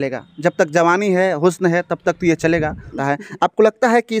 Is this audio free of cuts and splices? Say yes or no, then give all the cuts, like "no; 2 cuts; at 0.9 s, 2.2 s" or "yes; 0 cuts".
no; 1 cut; at 3.0 s